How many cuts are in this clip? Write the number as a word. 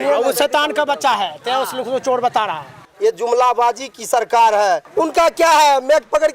two